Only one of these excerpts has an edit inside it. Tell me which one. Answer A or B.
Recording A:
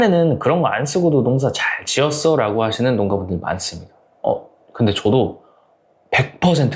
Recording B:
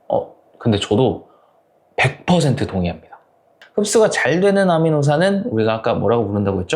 B